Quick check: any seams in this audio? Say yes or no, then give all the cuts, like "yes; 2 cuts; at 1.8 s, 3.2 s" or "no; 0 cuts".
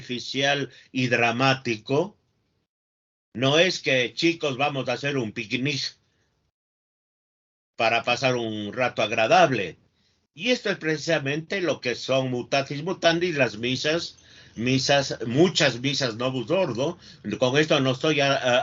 no; 0 cuts